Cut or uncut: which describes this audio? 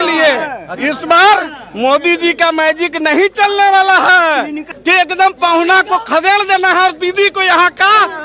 cut